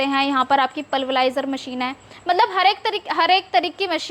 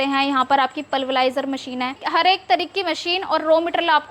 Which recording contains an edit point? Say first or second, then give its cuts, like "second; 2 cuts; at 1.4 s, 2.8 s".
second; 1 cut; at 2.0 s